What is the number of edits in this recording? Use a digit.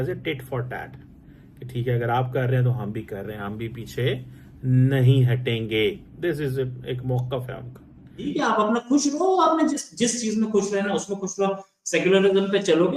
1